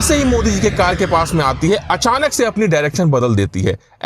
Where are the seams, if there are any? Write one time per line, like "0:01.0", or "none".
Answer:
none